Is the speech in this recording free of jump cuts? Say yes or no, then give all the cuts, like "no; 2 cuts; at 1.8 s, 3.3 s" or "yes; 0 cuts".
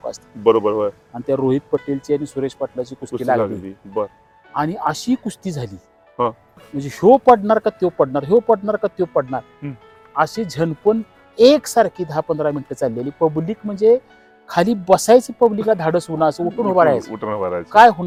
yes; 0 cuts